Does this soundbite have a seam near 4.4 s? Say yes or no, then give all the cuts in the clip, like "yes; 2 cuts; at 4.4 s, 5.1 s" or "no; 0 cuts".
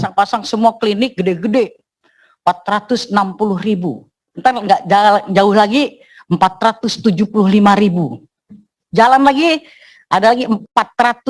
no; 0 cuts